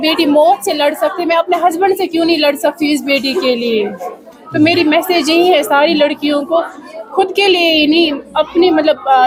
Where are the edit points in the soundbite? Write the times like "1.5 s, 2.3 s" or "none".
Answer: none